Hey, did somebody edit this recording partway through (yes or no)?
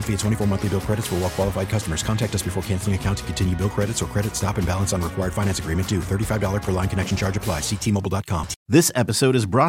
yes